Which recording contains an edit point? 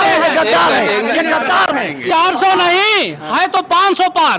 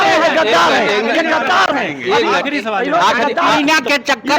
first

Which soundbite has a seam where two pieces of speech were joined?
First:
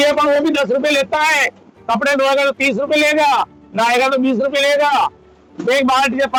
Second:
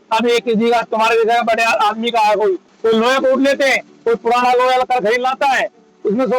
second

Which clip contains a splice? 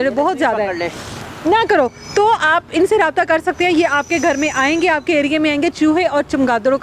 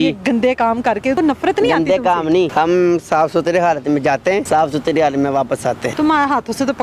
second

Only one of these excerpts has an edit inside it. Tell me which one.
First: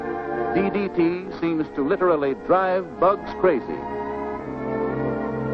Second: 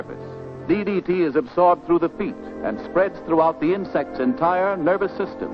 second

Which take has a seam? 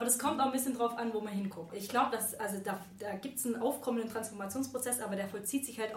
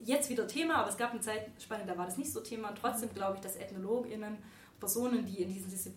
first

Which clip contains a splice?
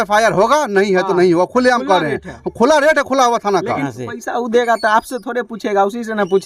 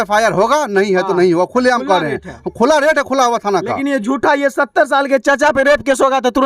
first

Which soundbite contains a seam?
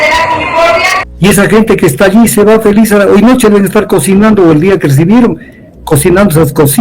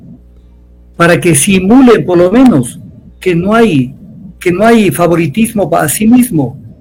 first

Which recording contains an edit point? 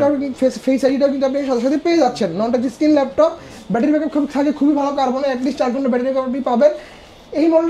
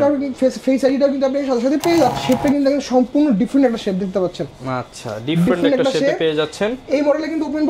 second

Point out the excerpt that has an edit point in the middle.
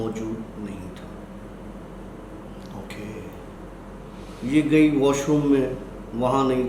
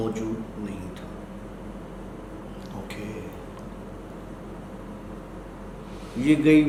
first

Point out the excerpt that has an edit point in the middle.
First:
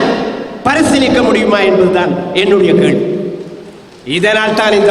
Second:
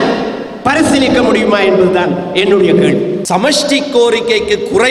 second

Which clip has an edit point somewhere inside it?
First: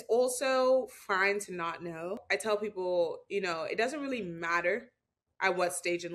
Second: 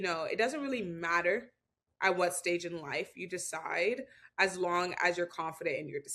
first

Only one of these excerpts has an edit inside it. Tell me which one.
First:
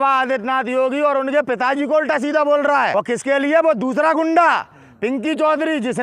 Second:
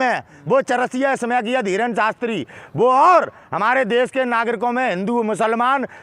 first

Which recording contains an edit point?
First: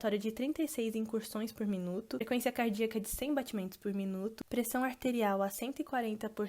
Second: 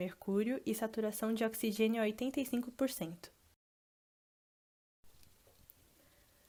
first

